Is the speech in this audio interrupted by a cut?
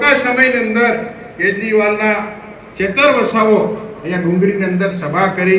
no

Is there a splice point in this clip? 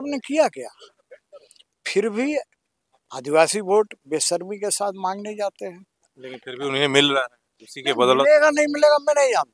no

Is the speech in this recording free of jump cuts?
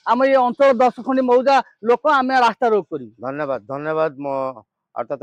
yes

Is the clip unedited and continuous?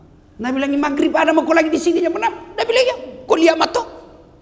yes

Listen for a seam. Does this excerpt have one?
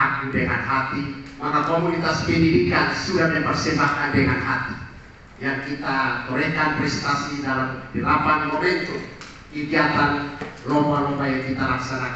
no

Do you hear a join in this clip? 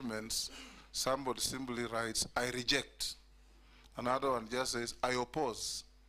no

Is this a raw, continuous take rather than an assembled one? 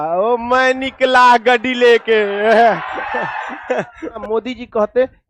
no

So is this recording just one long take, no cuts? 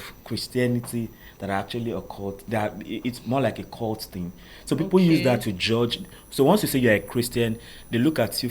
yes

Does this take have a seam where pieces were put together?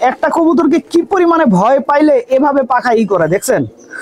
no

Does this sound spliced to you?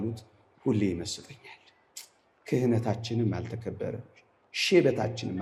no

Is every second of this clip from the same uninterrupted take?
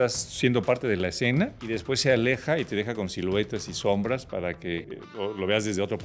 no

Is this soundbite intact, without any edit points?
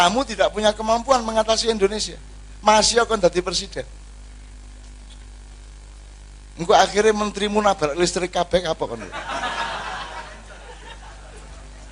yes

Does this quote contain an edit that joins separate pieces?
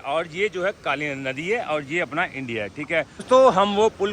yes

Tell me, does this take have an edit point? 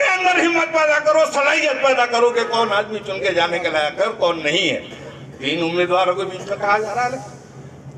no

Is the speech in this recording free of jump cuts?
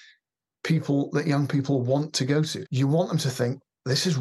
no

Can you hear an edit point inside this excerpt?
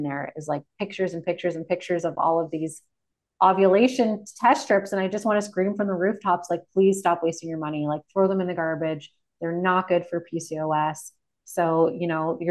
no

